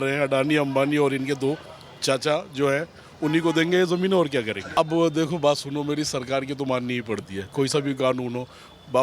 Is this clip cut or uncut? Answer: cut